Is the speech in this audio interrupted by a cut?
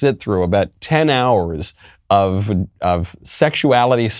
no; 0 cuts

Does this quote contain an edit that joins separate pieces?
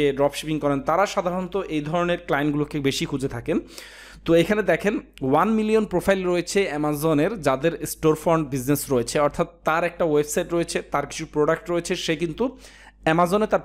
no; 0 cuts

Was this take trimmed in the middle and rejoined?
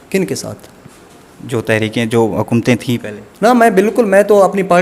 no; 0 cuts

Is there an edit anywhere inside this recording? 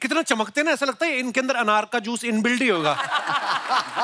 no; 0 cuts

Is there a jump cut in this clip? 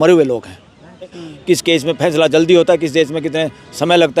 yes; 1 cut; at 1.2 s

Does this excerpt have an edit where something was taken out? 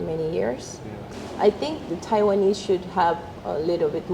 yes; 1 cut; at 1.1 s

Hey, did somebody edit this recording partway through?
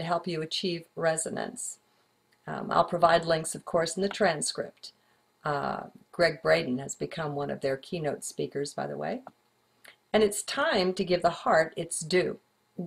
yes; 1 cut; at 9.0 s

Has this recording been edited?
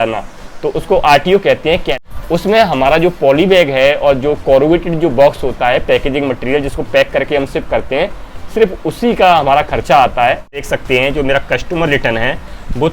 yes; 2 cuts; at 1.9 s, 10.7 s

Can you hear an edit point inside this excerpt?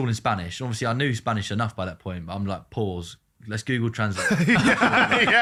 no; 0 cuts

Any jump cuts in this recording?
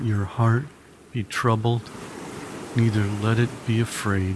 no; 0 cuts

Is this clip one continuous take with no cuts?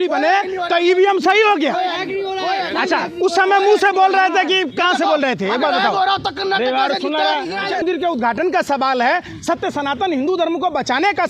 no; 1 cut; at 7.8 s

